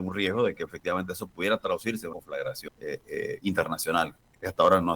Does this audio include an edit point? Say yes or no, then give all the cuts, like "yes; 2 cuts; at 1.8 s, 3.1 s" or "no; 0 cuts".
yes; 1 cut; at 2.3 s